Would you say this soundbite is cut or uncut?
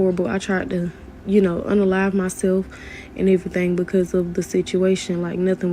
uncut